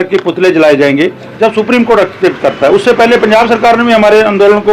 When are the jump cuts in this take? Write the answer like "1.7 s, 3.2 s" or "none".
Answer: 1.3 s